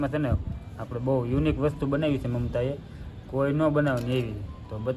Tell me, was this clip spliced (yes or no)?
no